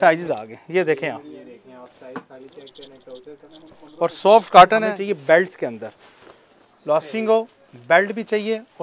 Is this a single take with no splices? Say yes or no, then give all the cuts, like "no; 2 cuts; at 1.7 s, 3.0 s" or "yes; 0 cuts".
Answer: no; 1 cut; at 4.9 s